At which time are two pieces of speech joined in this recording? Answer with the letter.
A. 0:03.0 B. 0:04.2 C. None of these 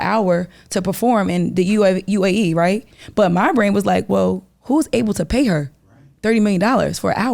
A